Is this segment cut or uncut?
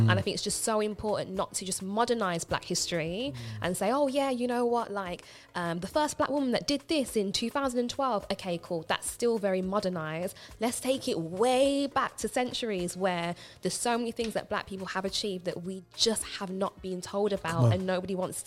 uncut